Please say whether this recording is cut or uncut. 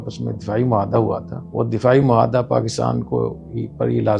cut